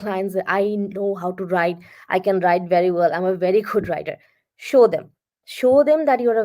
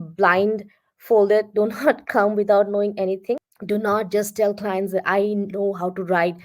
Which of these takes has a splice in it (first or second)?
second